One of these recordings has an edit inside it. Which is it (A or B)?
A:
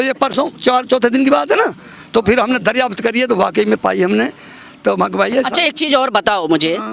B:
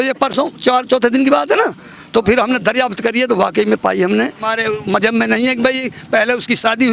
B